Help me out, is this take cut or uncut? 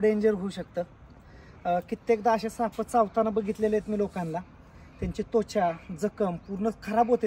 uncut